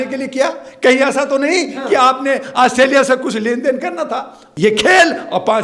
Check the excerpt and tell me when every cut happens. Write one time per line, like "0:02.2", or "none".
0:04.4

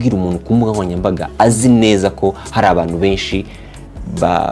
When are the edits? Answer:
none

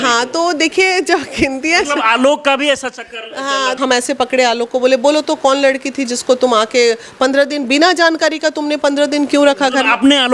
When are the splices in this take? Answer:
0:03.8

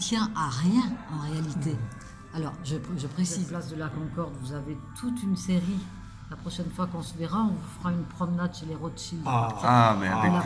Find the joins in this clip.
0:03.9

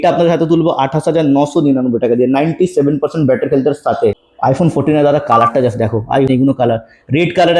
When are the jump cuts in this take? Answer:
0:04.3
0:06.3

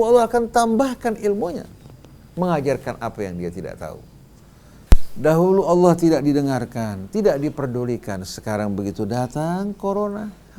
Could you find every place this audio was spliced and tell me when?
0:04.8

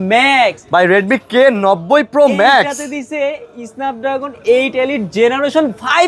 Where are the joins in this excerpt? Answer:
none

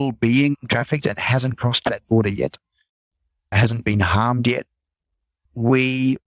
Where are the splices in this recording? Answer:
0:03.5
0:05.4

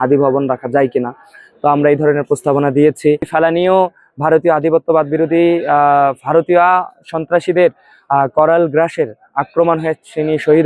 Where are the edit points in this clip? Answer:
0:03.3

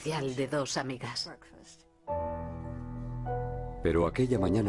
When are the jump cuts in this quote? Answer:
0:02.6

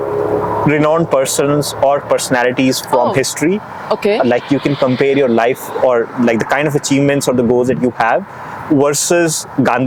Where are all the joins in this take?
none

